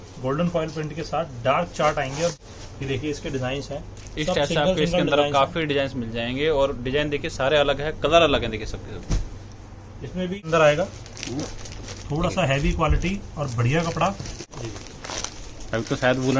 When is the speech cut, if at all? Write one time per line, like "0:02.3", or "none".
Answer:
0:02.4
0:10.5
0:14.4